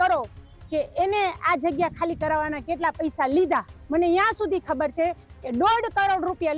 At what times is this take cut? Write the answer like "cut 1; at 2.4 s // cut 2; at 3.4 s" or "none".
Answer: cut 1; at 3.8 s